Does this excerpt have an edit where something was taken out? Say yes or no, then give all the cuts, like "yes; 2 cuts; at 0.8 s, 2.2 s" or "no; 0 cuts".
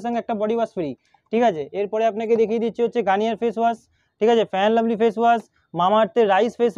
no; 0 cuts